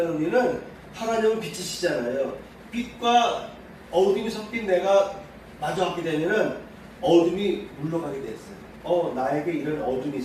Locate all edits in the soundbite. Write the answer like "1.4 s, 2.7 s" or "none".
none